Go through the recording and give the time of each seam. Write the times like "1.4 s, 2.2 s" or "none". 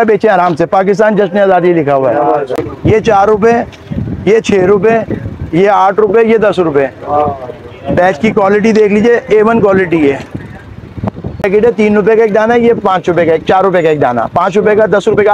2.6 s, 11.5 s